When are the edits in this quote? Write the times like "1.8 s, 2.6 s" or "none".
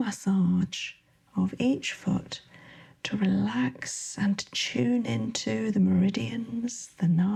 none